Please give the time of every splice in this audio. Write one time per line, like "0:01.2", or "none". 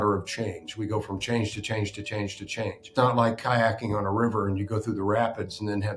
0:02.8